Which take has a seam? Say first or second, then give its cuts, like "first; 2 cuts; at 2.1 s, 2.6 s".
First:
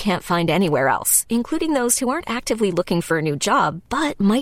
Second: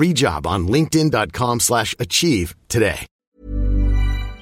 second; 1 cut; at 3.2 s